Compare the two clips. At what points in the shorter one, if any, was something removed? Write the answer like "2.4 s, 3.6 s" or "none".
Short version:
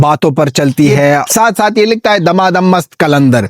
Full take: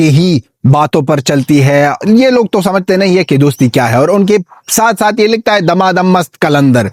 1.3 s